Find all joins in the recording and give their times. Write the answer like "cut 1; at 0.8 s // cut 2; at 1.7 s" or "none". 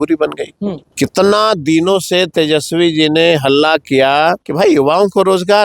cut 1; at 0.8 s // cut 2; at 4.5 s